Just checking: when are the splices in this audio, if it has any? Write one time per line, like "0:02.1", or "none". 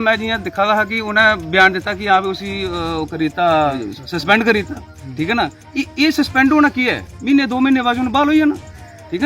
0:03.8